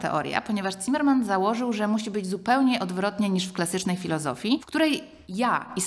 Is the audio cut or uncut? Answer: uncut